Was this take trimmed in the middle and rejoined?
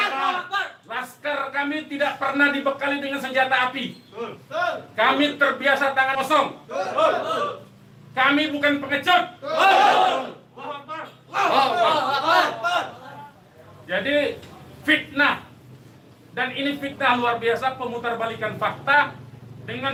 no; 0 cuts

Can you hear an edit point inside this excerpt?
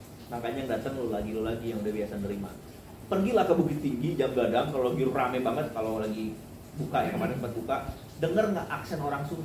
no; 0 cuts

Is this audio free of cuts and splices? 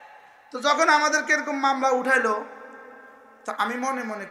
yes; 0 cuts

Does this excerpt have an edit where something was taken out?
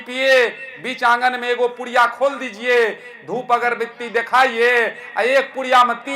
no; 0 cuts

